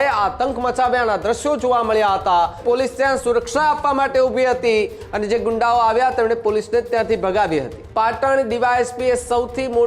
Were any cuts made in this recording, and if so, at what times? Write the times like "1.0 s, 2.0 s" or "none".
2.6 s, 7.8 s